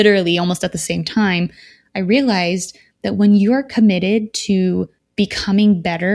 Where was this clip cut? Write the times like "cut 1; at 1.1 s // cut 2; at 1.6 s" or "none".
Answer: cut 1; at 5.0 s